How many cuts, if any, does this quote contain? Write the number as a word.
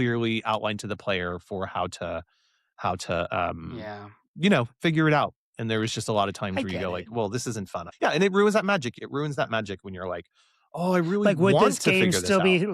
two